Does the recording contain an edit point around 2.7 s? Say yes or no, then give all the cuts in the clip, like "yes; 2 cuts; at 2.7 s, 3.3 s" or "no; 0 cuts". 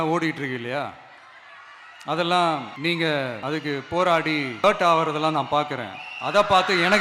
yes; 3 cuts; at 2.7 s, 3.4 s, 4.6 s